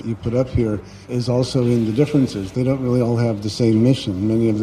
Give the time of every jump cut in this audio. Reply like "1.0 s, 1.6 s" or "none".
1.1 s